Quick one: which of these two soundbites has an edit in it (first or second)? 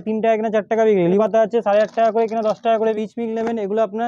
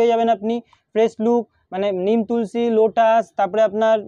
first